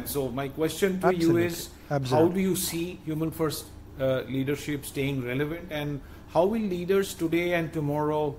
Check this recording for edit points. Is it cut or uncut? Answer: uncut